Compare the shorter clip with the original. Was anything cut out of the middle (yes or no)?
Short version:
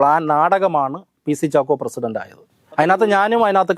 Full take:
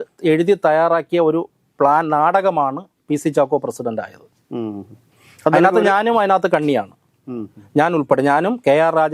yes